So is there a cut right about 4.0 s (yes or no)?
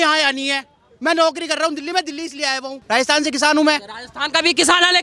no